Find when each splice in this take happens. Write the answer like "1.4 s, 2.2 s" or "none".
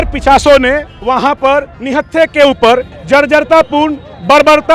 0.9 s, 1.8 s, 2.9 s